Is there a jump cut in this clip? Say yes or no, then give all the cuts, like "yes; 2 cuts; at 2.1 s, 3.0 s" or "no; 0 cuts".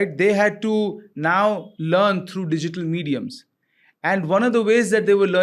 no; 0 cuts